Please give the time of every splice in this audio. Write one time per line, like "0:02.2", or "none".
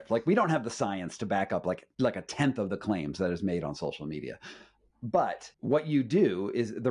0:01.9
0:05.5